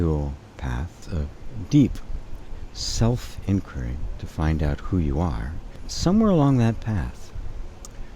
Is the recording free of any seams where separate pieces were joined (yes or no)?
no